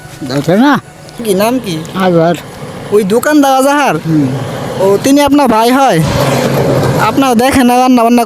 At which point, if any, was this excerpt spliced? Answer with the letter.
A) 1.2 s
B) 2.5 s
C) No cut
A